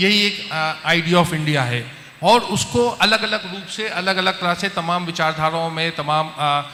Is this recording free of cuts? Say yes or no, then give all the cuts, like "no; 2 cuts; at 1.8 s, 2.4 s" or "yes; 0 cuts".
yes; 0 cuts